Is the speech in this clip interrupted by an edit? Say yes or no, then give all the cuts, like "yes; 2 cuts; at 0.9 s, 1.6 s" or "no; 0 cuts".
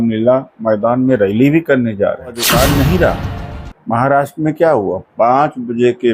yes; 1 cut; at 2.4 s